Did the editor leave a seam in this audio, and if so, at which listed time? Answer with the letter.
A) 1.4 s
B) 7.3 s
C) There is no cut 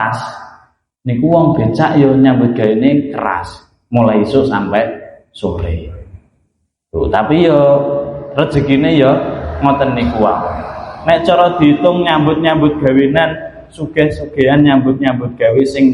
C